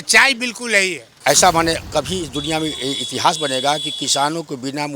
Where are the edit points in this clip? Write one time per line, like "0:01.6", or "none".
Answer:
0:01.1

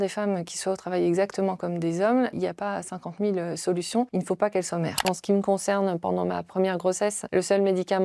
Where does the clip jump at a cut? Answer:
0:02.3
0:04.1
0:05.0
0:07.2

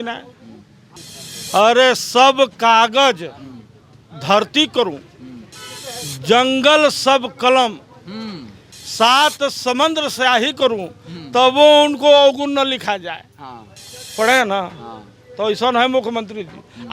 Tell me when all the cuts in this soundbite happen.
0:00.9

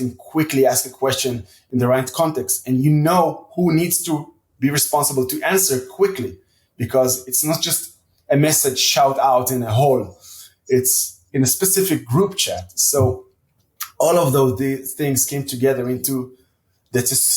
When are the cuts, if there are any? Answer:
0:01.5

